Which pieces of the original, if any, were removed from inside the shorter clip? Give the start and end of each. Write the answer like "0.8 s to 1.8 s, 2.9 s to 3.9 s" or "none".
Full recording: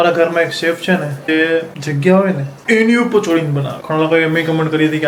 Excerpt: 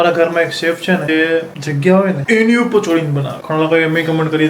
1.0 s to 1.2 s, 2.4 s to 2.6 s